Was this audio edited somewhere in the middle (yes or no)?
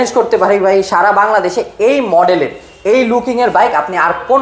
no